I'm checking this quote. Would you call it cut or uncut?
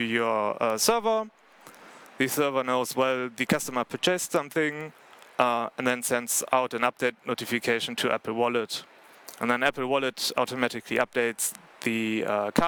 uncut